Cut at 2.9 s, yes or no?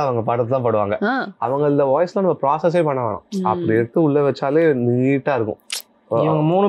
no